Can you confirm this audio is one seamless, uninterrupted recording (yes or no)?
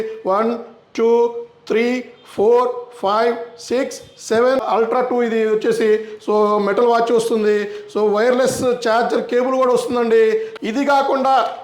no